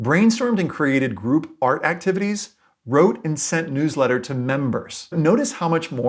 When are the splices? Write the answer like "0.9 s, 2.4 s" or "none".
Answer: 5.1 s